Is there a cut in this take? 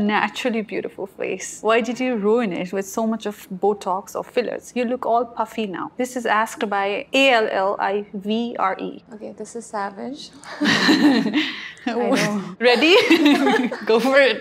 no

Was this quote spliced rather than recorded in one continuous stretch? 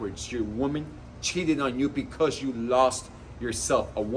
no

